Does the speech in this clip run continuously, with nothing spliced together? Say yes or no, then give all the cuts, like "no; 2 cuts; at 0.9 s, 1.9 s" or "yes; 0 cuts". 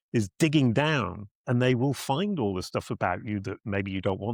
yes; 0 cuts